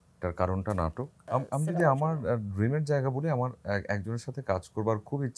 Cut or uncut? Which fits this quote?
cut